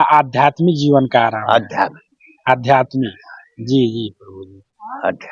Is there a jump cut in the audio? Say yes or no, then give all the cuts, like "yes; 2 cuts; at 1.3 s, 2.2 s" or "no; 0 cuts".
no; 0 cuts